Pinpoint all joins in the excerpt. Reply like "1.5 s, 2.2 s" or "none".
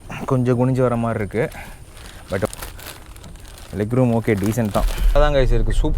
2.5 s, 5.2 s